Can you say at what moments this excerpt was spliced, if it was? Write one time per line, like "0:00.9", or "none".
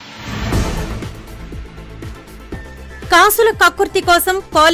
0:00.9